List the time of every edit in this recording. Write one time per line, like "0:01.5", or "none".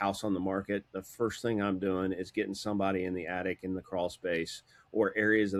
none